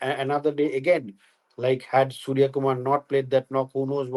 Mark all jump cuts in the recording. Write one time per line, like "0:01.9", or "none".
none